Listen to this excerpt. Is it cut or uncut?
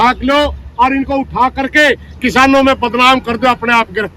uncut